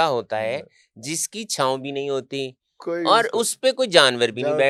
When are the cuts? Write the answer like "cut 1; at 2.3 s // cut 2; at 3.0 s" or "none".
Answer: none